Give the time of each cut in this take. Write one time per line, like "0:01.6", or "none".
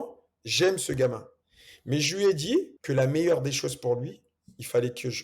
0:02.8

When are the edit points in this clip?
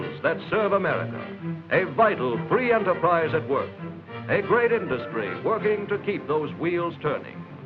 0:06.2

